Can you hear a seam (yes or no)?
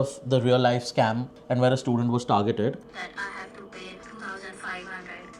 yes